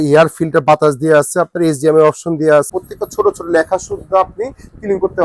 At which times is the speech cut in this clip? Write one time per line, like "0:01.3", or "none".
0:02.7